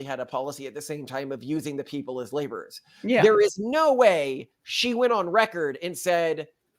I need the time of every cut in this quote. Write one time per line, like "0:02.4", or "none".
none